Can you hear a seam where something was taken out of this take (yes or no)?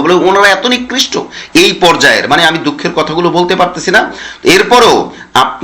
no